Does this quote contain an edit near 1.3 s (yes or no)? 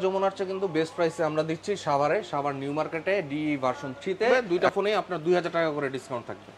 no